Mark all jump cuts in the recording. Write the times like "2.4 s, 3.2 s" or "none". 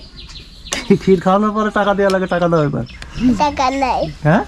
none